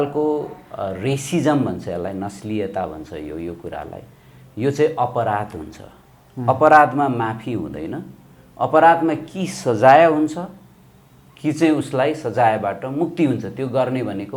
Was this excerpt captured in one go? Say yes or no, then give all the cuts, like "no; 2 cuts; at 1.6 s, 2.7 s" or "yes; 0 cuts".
yes; 0 cuts